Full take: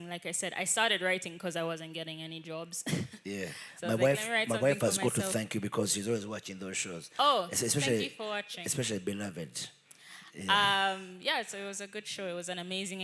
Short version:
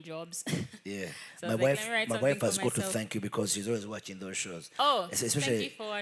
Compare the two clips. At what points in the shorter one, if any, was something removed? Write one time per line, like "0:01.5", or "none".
none